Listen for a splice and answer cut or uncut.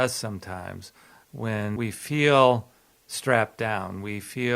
cut